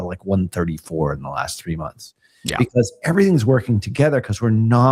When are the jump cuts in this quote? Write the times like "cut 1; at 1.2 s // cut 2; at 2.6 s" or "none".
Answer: none